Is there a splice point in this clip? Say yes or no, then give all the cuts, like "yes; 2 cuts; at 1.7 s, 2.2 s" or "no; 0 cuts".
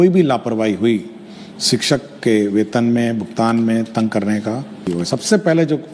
yes; 1 cut; at 4.8 s